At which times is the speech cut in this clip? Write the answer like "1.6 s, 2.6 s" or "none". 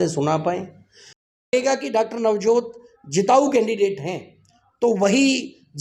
1.5 s